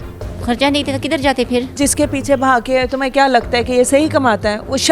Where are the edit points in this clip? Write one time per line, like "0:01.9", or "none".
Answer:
0:01.7